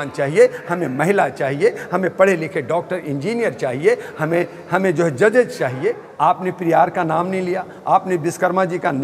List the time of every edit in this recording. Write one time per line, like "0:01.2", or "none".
0:06.1